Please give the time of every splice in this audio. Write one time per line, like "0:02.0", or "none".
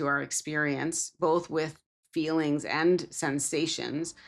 none